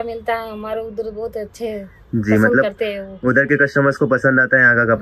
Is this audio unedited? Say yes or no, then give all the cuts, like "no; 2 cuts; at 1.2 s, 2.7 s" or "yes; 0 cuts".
yes; 0 cuts